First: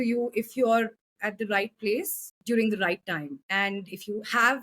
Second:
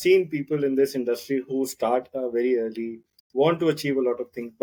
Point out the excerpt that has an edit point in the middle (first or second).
first